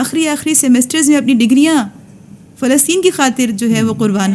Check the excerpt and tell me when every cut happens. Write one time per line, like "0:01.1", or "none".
none

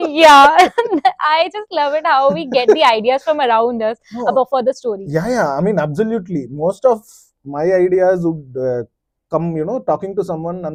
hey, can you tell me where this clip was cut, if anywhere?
none

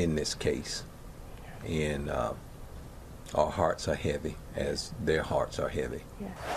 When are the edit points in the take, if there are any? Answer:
0:05.2

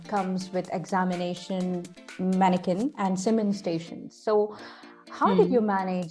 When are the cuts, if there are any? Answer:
none

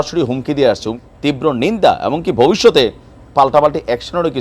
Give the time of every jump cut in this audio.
0:01.0

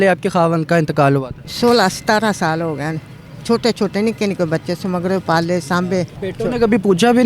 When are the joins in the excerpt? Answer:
0:01.4
0:06.2

